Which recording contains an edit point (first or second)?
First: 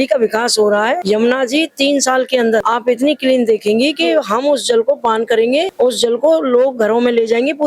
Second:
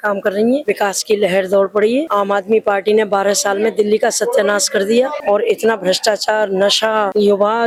first